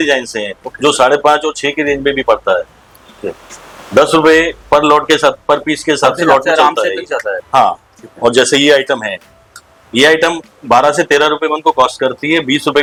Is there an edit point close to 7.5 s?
no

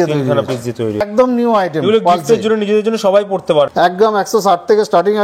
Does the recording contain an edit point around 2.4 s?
no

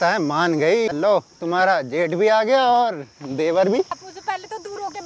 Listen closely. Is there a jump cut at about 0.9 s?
yes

